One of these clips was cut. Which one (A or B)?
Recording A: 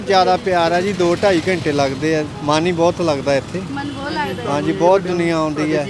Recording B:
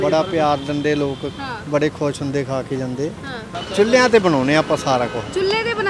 B